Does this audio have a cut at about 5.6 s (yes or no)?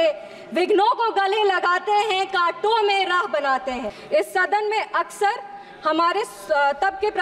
no